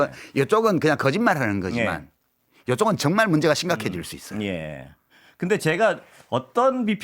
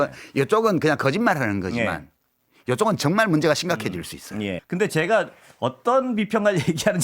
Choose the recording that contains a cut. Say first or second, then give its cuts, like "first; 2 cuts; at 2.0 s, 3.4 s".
second; 1 cut; at 4.6 s